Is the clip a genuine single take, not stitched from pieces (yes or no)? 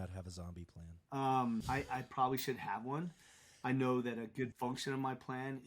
no